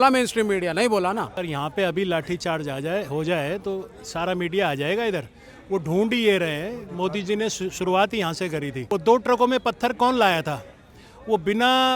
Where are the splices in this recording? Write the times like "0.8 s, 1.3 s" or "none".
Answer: 1.4 s, 8.8 s